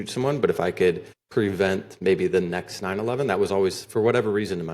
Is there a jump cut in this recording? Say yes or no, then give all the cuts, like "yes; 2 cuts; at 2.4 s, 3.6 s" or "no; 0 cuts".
yes; 1 cut; at 1.1 s